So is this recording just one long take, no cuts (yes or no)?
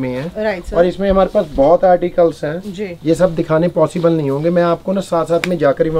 yes